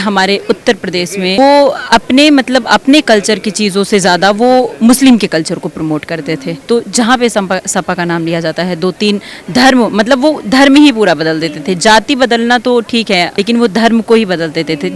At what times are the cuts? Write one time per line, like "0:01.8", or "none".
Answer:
0:01.4
0:06.5
0:13.3